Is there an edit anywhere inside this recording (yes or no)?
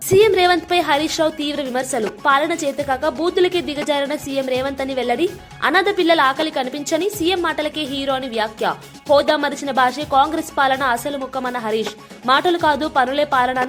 no